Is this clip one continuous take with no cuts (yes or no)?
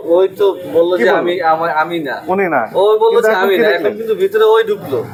yes